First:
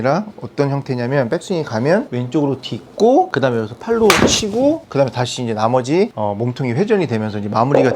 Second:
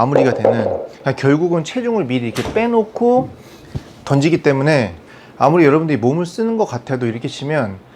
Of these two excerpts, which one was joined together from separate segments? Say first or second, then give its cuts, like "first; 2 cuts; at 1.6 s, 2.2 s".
first; 4 cuts; at 2.2 s, 3.3 s, 4.8 s, 6.1 s